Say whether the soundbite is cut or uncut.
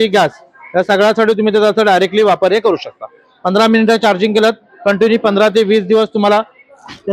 uncut